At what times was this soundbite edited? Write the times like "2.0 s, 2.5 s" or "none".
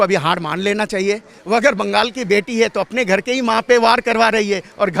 1.3 s